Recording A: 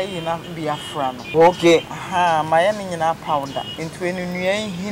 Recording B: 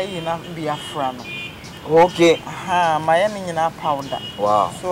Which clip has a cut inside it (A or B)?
A